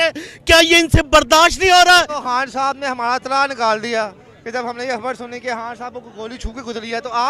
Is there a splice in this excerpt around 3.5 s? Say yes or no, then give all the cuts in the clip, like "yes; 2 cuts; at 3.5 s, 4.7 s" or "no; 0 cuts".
no; 1 cut; at 2.2 s